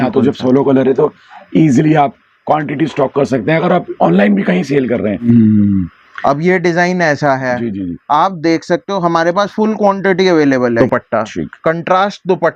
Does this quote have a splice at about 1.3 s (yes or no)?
no